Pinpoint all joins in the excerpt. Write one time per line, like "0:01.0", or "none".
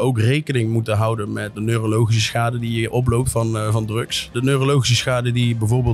0:01.5
0:04.3